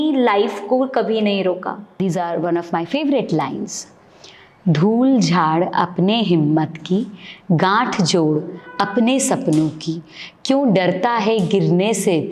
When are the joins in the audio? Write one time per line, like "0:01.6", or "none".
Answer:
0:02.0